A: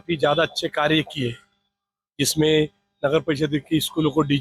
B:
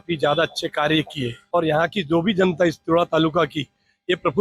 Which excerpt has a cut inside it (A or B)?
B